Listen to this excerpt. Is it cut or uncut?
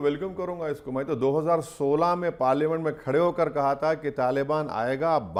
uncut